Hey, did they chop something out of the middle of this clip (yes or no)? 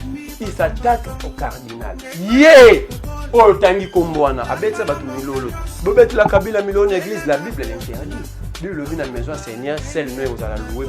yes